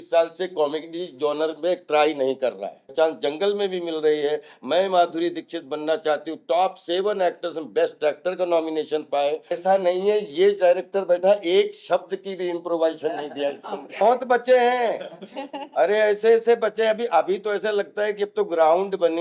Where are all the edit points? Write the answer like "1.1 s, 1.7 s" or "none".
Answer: 2.9 s, 9.5 s, 14.0 s